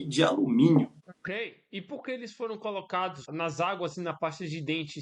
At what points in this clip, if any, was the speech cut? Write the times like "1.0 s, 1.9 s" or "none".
1.1 s, 3.3 s